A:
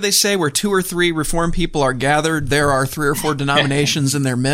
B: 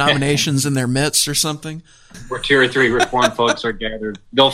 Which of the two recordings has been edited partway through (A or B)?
B